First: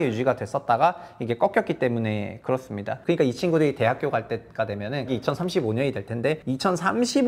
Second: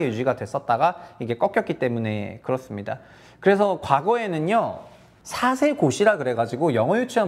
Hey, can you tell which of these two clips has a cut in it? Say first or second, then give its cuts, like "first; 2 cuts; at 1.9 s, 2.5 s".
first; 3 cuts; at 2.9 s, 5.1 s, 6.4 s